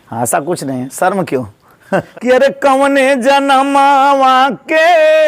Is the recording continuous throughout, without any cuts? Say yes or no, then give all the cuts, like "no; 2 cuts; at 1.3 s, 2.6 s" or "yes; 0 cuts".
no; 1 cut; at 2.1 s